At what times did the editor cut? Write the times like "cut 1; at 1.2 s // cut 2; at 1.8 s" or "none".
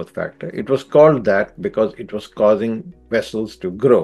none

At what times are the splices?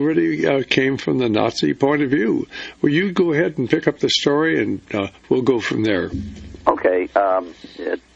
cut 1; at 4.3 s

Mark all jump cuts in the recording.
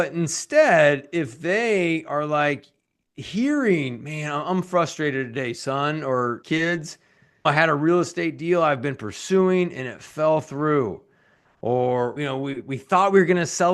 none

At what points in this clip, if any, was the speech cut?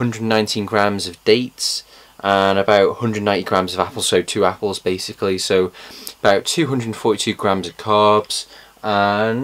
none

